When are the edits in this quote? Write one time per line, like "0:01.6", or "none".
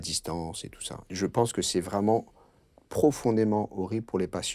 0:01.0